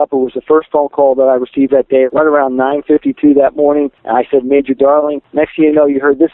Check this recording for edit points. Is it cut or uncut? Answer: cut